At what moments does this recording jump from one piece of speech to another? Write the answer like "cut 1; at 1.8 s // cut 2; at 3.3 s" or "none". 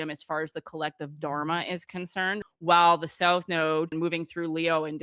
cut 1; at 2.4 s // cut 2; at 3.9 s